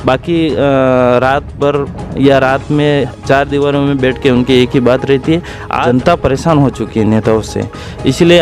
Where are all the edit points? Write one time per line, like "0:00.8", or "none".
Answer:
0:05.8

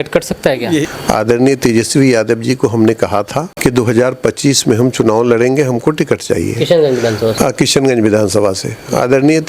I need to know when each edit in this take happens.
0:00.8
0:03.5

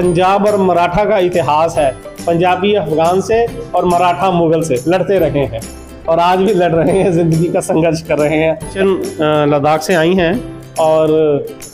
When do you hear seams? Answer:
0:08.7

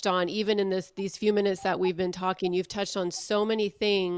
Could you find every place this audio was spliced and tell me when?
none

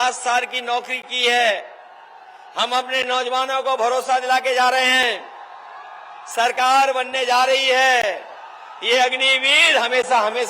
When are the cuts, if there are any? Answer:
none

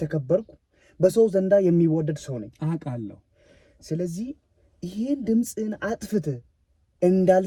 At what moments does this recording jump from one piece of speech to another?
none

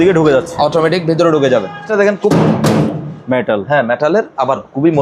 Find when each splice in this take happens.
0:01.9

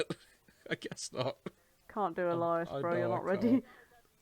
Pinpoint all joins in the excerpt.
0:01.7

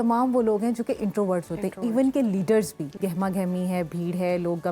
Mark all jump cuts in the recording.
0:02.9

